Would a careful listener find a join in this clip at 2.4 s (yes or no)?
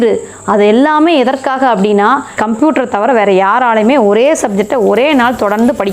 yes